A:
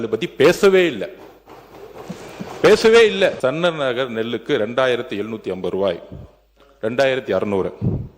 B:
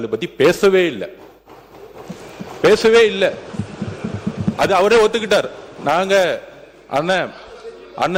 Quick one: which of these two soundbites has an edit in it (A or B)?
A